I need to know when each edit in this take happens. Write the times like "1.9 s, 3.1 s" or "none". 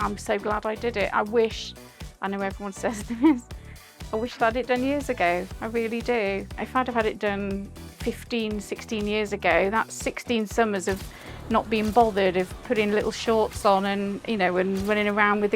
6.6 s